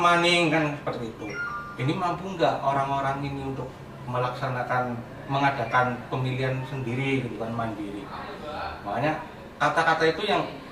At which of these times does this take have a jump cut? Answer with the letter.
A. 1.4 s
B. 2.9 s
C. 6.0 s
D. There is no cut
D